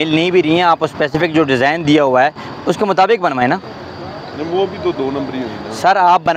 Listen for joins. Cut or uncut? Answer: uncut